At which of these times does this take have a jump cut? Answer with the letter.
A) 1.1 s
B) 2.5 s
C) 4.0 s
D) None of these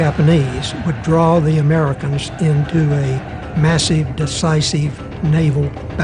D